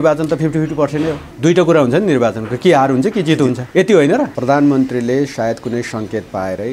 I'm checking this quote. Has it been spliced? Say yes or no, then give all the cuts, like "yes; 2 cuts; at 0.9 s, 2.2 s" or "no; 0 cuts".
yes; 3 cuts; at 1.3 s, 3.6 s, 4.4 s